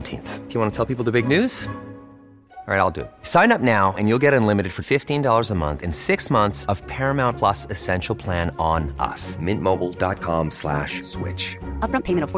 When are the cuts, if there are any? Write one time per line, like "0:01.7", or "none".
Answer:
none